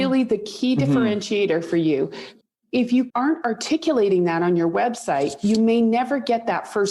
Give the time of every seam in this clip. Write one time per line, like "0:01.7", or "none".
0:02.3
0:03.1